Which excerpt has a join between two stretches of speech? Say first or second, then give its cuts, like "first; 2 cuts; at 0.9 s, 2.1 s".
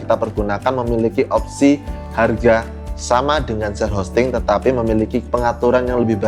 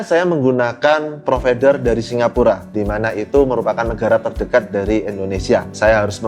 first; 1 cut; at 5.3 s